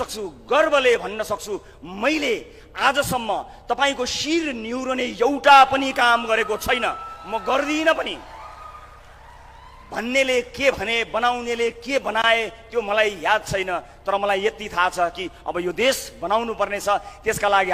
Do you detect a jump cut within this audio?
no; 0 cuts

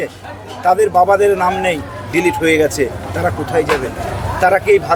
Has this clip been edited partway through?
no; 0 cuts

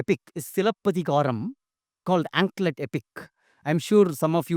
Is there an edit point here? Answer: no; 0 cuts

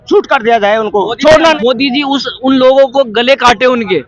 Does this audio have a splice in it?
yes; 1 cut; at 1.6 s

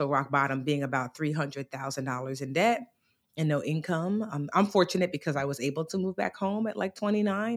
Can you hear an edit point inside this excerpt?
no; 0 cuts

